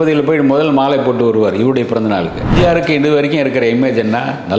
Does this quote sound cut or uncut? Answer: cut